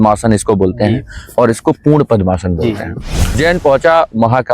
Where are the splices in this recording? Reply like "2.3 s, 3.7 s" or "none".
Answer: 3.4 s